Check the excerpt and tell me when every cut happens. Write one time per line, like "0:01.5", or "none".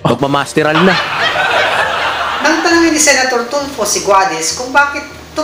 0:01.0
0:02.2